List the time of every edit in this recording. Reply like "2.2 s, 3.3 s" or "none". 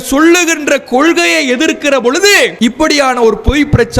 2.5 s